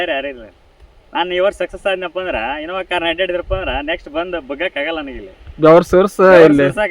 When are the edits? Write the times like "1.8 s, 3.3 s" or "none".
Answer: none